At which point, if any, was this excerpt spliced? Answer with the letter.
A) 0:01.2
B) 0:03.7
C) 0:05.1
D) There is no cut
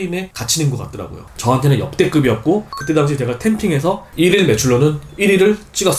A